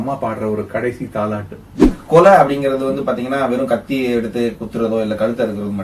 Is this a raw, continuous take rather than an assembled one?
no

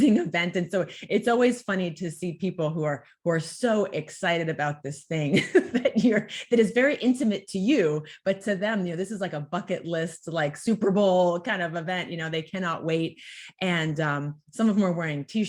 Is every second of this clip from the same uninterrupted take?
yes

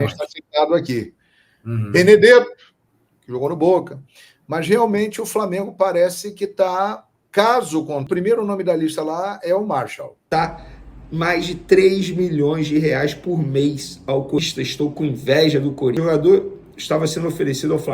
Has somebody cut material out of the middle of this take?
yes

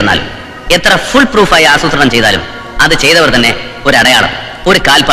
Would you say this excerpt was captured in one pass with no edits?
yes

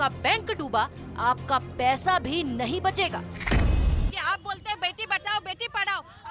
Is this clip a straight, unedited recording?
no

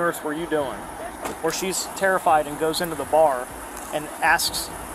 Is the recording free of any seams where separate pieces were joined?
no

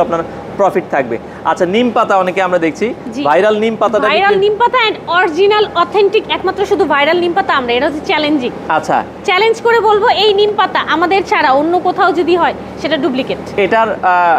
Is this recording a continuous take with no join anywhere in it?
yes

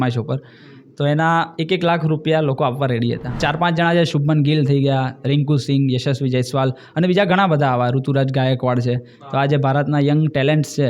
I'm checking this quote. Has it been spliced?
yes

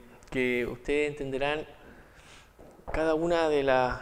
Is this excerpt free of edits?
yes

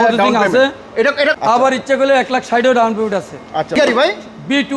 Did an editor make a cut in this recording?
yes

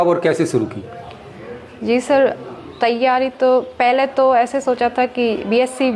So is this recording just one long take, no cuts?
yes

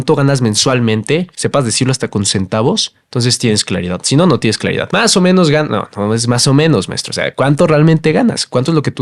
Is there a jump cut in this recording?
no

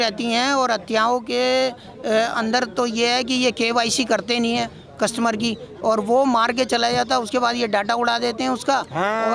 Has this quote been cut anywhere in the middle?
no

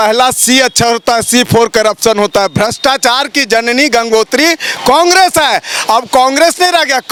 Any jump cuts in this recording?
no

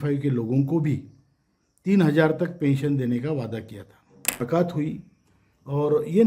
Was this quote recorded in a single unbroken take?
no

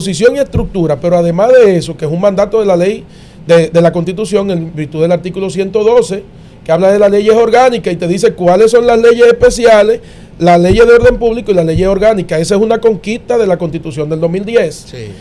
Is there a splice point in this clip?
no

